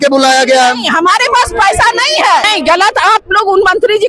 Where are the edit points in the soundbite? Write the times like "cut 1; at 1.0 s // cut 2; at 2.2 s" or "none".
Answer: cut 1; at 2.5 s